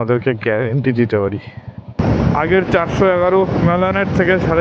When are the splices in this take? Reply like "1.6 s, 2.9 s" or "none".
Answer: 2.0 s, 3.6 s